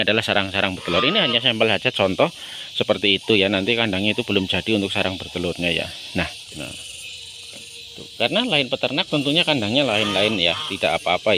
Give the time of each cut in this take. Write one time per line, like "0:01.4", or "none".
0:06.4